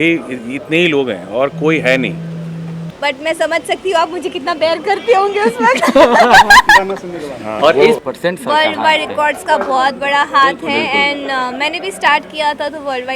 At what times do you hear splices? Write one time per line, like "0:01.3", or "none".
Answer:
0:02.7
0:08.0